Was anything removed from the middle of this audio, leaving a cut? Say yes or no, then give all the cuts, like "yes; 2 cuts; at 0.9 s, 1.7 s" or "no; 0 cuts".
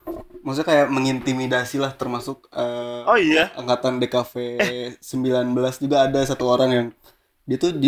no; 0 cuts